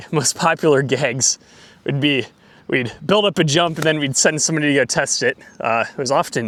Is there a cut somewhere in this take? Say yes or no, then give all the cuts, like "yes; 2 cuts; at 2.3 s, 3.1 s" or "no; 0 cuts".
no; 0 cuts